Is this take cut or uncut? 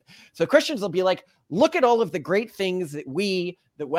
uncut